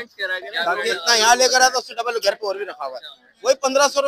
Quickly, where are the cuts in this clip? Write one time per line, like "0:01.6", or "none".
0:01.0